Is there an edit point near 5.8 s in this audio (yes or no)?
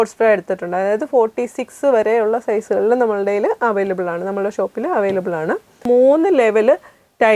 yes